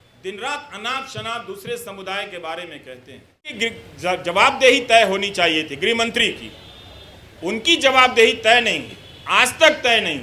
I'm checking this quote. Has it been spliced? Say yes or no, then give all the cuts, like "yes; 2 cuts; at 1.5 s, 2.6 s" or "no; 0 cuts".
yes; 1 cut; at 3.5 s